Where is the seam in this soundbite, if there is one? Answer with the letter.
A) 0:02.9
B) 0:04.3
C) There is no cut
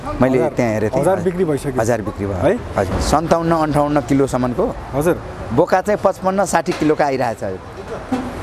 A